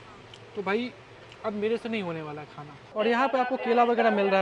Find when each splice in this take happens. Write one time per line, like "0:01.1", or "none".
0:02.8